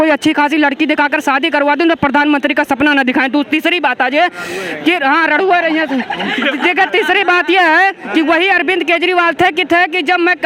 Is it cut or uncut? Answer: uncut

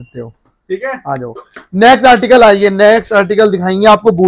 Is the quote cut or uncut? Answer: uncut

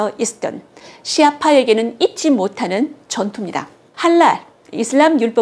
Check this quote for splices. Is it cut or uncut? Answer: cut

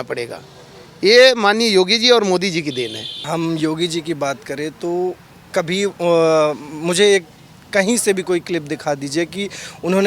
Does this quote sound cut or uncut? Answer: cut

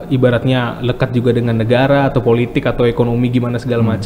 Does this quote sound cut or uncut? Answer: uncut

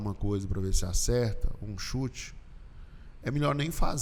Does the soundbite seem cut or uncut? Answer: uncut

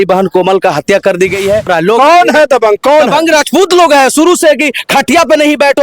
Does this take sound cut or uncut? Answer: cut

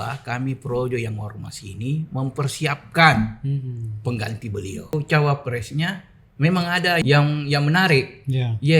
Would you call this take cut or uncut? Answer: cut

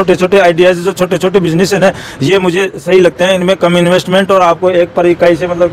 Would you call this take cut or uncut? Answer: uncut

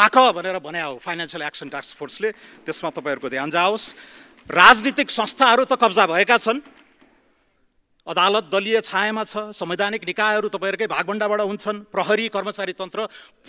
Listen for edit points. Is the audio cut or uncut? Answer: uncut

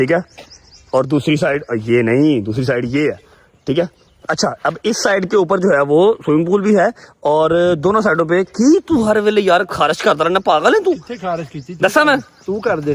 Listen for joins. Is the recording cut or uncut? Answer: uncut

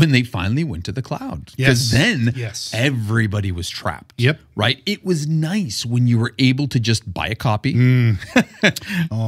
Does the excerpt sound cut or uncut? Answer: uncut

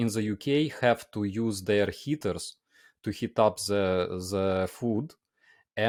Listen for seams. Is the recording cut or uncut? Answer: uncut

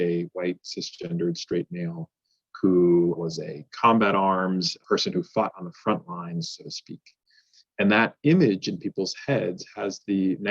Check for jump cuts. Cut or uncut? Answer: cut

